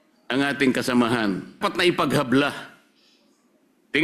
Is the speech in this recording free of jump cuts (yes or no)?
no